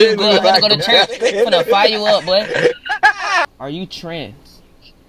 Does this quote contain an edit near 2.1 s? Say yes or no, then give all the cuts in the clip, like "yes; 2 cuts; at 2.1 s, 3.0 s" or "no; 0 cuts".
no; 1 cut; at 3.6 s